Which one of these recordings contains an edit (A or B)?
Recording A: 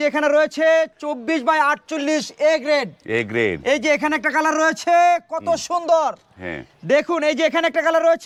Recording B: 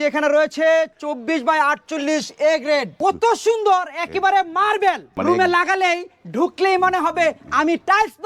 B